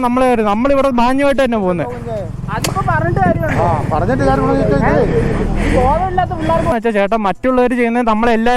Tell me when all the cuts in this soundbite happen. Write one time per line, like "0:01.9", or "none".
0:06.7